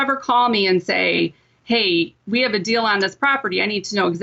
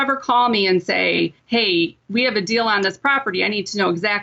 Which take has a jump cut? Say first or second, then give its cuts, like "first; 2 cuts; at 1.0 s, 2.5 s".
second; 1 cut; at 1.4 s